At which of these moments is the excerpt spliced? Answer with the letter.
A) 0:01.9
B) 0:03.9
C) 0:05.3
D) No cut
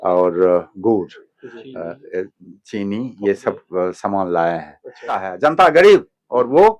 C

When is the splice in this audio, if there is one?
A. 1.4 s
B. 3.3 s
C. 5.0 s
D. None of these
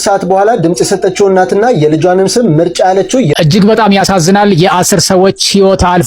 B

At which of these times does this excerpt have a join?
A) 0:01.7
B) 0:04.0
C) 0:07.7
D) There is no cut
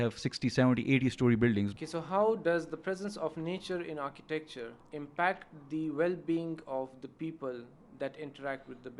A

